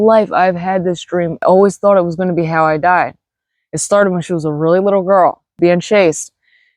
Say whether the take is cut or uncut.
cut